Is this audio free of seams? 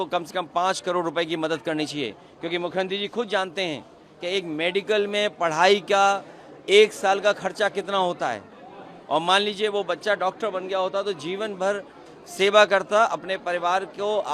yes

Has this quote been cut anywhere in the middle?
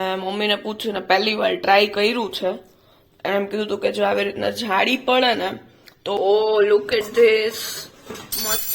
yes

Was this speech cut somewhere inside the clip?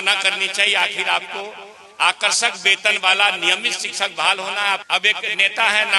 yes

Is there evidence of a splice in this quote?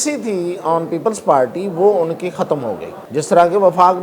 yes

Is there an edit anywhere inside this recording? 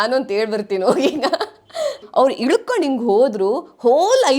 yes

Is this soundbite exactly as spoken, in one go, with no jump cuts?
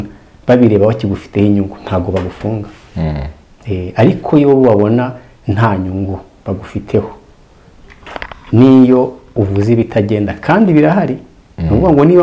yes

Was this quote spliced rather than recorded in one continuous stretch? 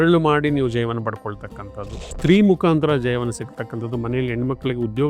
yes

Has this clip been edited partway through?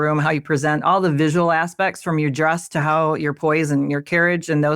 no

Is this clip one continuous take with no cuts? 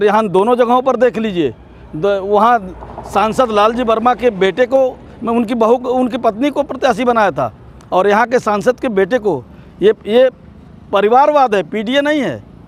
yes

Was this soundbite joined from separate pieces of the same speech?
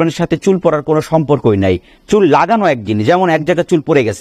no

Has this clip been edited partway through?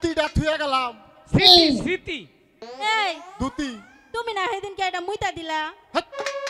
no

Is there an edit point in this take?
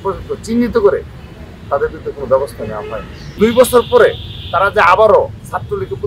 yes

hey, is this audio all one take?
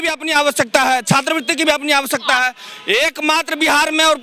yes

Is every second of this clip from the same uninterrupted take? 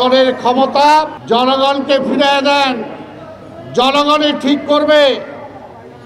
no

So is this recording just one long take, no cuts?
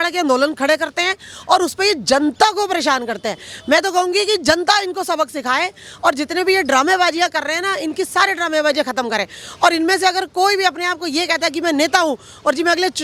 yes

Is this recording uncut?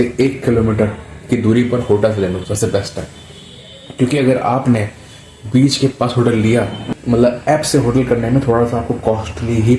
no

